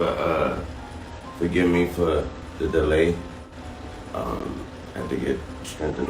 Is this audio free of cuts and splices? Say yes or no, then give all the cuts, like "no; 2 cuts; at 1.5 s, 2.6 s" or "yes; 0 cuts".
no; 1 cut; at 4.8 s